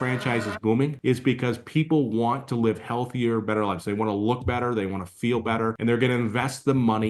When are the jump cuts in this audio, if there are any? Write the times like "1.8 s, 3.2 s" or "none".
1.0 s, 5.8 s